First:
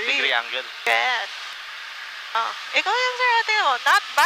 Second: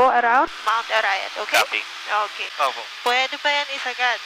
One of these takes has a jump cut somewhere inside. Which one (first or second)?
second